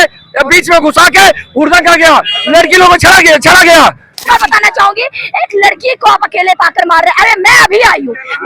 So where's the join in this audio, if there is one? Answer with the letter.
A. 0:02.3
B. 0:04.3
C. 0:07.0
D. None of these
B